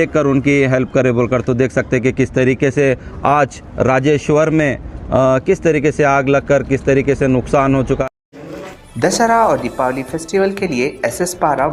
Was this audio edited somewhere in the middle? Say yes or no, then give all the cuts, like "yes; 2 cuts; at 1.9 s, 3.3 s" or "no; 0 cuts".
no; 0 cuts